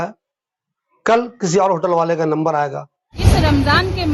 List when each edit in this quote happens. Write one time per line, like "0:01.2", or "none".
0:03.1